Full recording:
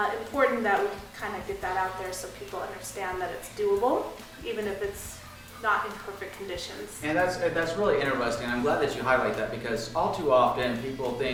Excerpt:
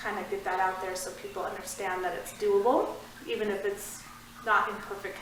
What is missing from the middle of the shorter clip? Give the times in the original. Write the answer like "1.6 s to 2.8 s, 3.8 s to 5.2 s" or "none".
none

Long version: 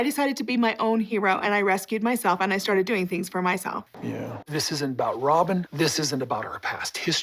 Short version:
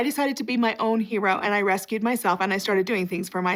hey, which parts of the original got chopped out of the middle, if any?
none

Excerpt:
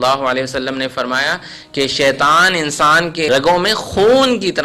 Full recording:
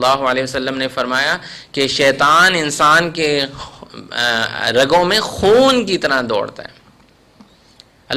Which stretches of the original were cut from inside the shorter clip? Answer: 3.3 s to 4.7 s

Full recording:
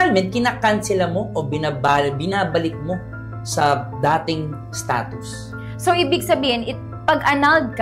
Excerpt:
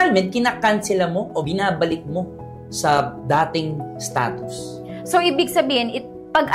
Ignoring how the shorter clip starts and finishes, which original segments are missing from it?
1.5 s to 2.2 s

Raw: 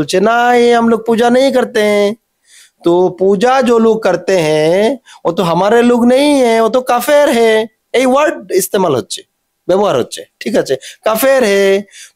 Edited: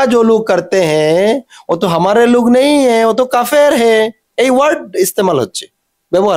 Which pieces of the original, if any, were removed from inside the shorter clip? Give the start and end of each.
none

